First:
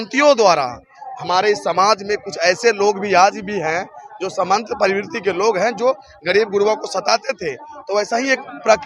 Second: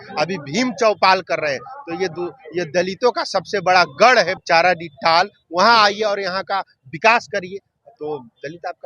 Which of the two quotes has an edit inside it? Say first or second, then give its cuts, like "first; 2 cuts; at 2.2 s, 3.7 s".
second; 1 cut; at 4.4 s